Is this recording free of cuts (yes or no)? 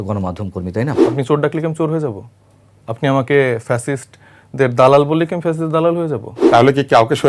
no